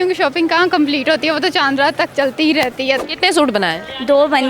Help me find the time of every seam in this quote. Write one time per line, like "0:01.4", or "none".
0:03.0